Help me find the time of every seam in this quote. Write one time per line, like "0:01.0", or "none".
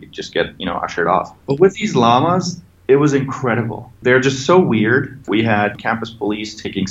0:01.3
0:03.9
0:05.7